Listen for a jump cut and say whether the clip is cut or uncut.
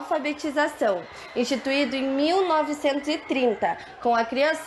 uncut